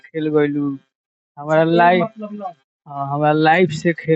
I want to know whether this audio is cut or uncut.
uncut